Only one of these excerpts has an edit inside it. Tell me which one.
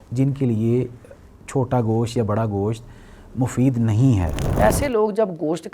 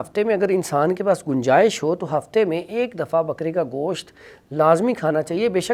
first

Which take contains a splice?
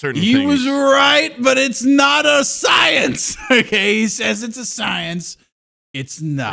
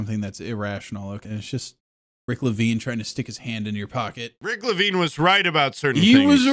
second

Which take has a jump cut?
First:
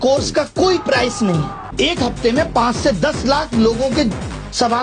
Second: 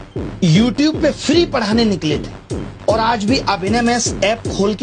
first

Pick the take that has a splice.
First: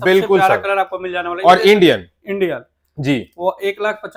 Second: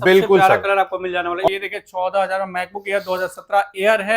second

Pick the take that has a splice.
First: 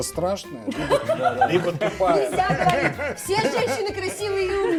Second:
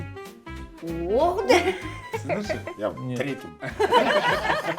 second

